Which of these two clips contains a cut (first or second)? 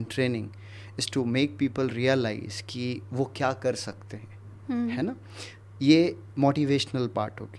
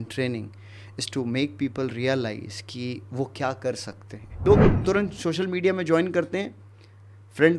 second